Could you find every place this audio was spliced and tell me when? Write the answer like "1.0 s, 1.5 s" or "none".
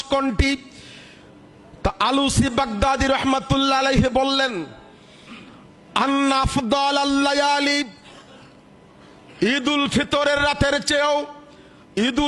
none